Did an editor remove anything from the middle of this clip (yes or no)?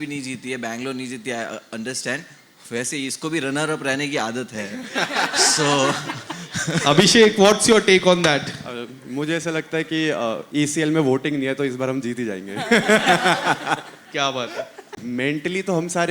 yes